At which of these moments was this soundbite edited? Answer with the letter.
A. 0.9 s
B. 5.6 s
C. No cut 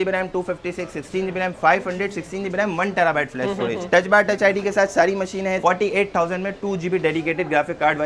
B